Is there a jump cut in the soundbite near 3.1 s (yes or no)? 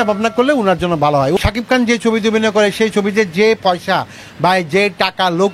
no